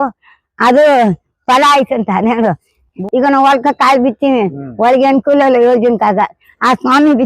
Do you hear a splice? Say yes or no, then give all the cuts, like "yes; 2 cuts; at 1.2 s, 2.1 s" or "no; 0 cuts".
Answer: yes; 1 cut; at 2.9 s